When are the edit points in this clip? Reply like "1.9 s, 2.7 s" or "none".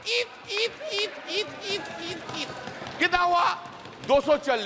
none

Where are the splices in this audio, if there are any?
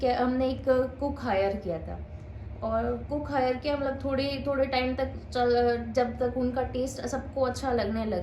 none

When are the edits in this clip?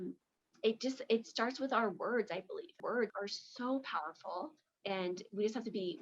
2.9 s, 4.7 s

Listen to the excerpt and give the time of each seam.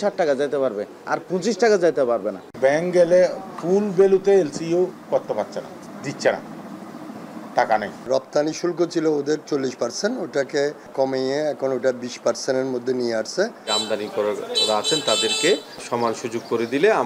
2.4 s, 5.9 s, 8.1 s, 10.9 s, 13.7 s, 15.8 s

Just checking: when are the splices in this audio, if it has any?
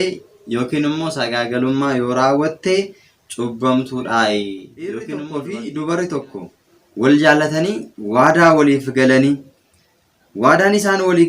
5.0 s

